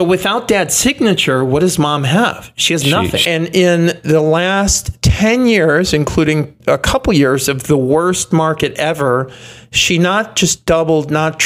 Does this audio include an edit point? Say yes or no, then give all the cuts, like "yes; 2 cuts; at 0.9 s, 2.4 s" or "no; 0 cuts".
yes; 1 cut; at 3.2 s